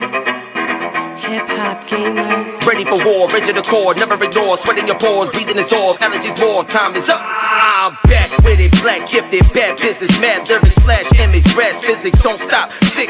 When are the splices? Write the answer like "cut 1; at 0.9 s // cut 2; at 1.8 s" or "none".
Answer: cut 1; at 1.1 s